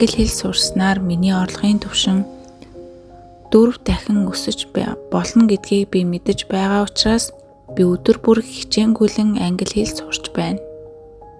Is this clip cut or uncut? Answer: uncut